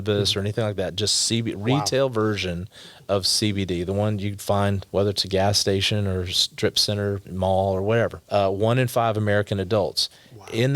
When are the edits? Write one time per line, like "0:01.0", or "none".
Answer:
0:04.8
0:08.2